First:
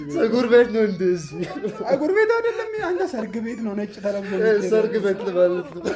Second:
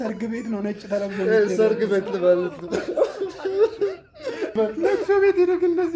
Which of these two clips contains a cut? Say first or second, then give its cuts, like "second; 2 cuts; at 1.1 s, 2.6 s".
second; 1 cut; at 4.5 s